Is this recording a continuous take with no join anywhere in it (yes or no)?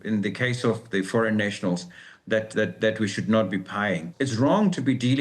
no